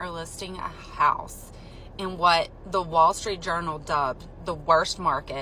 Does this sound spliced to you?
no; 0 cuts

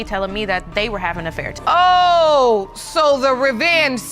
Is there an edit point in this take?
yes; 1 cut; at 1.5 s

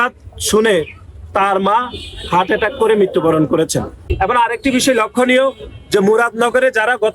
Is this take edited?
yes; 1 cut; at 4.0 s

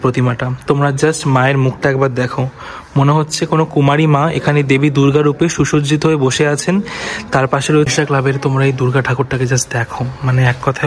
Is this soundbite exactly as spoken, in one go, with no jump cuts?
no; 1 cut; at 7.9 s

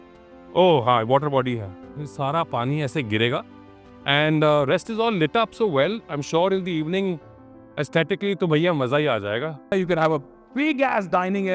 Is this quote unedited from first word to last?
no; 1 cut; at 9.7 s

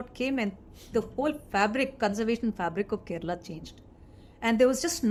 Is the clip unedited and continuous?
yes; 0 cuts

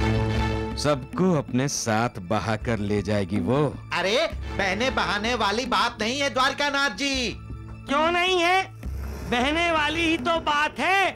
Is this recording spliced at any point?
no; 0 cuts

